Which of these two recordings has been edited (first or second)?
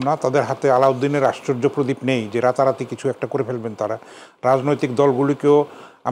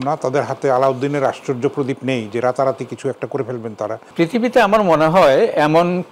second